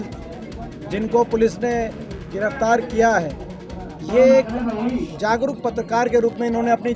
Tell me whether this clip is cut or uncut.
uncut